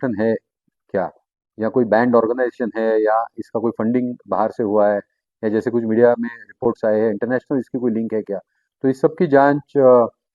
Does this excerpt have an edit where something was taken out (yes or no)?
no